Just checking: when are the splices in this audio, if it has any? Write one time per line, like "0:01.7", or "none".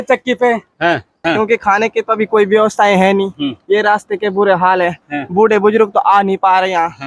0:01.1